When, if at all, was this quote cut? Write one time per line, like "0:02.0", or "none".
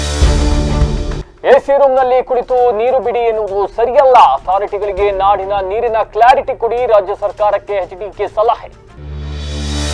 0:00.9